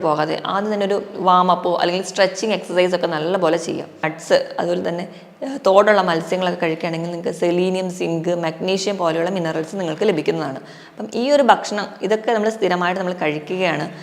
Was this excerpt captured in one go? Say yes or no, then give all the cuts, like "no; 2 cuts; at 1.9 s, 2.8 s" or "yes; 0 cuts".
no; 1 cut; at 4.1 s